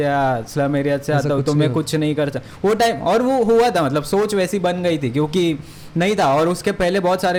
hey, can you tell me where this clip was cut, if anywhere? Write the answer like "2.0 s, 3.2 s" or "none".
none